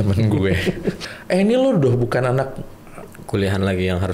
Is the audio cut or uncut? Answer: cut